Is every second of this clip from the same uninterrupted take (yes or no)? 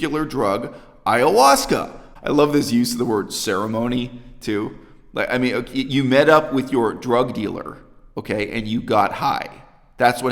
no